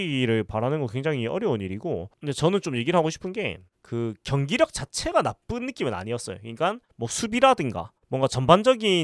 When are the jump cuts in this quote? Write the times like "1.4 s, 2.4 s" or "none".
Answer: 2.1 s